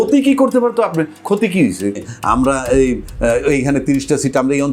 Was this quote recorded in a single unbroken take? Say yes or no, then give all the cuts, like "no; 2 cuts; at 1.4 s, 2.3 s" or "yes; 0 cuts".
no; 1 cut; at 2.0 s